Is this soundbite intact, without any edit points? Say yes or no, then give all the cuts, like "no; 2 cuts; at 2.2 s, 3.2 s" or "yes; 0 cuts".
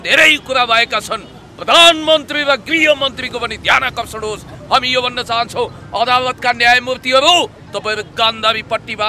yes; 0 cuts